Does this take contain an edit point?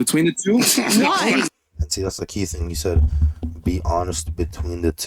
no; 0 cuts

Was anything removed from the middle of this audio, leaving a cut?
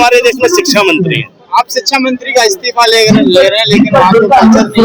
no; 0 cuts

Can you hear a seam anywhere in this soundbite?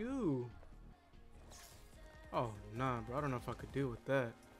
no; 0 cuts

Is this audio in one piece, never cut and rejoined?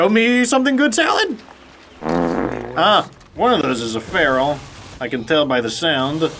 no; 1 cut; at 3.2 s

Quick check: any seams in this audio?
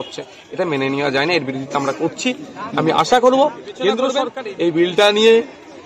yes; 1 cut; at 4.2 s

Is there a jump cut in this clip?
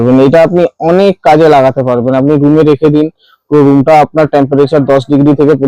no; 0 cuts

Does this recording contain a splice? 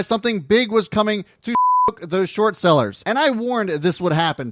yes; 1 cut; at 3.0 s

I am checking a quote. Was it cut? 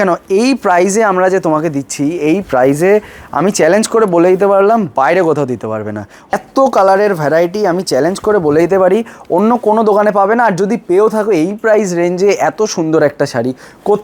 yes; 1 cut; at 6.3 s

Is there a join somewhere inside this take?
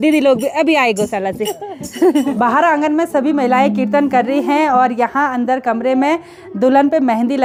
no; 0 cuts

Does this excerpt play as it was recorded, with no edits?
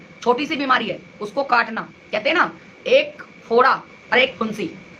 yes; 0 cuts

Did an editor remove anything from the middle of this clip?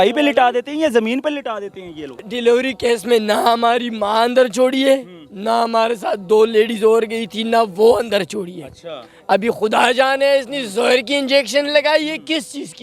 yes; 1 cut; at 2.3 s

